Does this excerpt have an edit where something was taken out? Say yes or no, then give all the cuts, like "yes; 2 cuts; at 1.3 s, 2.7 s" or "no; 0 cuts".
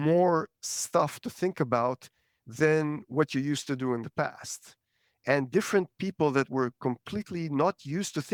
no; 0 cuts